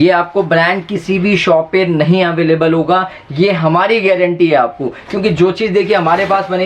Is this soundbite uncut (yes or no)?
yes